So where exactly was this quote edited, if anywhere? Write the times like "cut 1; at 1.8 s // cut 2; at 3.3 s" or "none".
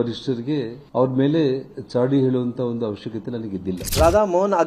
none